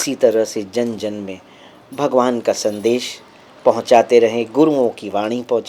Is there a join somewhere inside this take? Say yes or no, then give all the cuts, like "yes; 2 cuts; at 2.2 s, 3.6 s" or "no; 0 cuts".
no; 0 cuts